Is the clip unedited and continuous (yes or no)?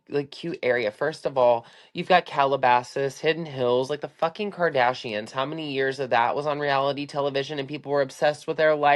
yes